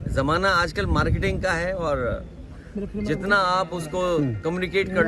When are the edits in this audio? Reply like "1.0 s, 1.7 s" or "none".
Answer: none

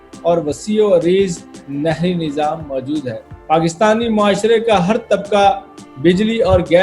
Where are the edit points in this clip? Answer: 3.3 s

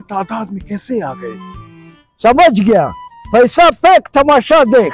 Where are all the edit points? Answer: 1.9 s

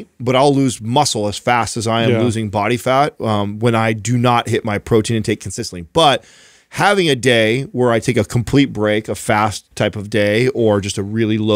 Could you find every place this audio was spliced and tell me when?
none

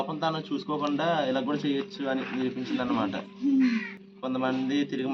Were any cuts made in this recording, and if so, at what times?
4.0 s

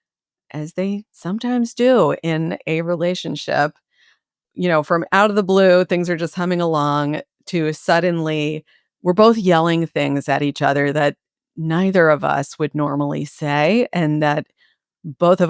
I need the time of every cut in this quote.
4.4 s

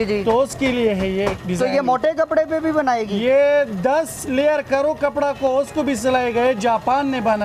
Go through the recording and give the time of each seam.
none

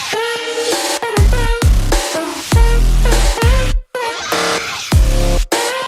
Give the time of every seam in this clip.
4.7 s

